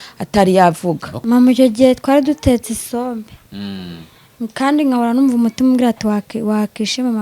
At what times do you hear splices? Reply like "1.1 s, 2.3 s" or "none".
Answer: 1.1 s